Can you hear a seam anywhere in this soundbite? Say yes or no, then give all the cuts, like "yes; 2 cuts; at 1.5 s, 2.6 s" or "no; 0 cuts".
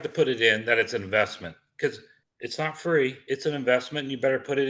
yes; 1 cut; at 3.2 s